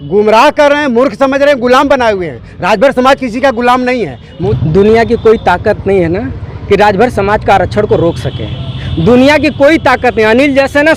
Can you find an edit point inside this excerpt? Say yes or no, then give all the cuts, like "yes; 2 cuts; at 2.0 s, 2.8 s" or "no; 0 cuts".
yes; 1 cut; at 4.4 s